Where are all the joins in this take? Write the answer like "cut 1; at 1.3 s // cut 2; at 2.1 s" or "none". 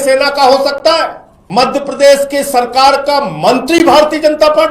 cut 1; at 1.3 s